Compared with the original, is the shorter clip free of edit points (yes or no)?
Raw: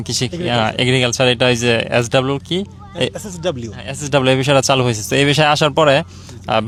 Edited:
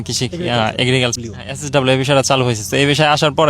no